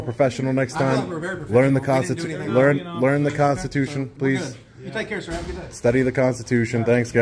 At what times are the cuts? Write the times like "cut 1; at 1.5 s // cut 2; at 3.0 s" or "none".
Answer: none